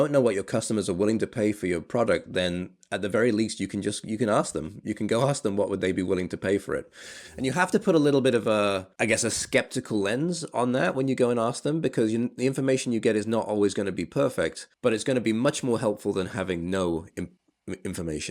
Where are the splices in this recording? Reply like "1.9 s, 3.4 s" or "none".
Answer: 8.9 s, 14.6 s, 17.1 s